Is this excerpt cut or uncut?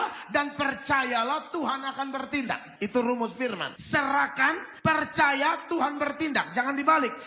cut